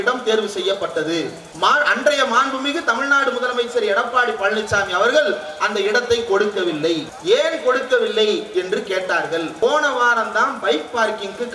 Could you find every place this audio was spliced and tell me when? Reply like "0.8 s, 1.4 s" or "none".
1.4 s, 7.1 s, 9.5 s